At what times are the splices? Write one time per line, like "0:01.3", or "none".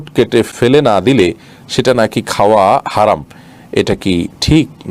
none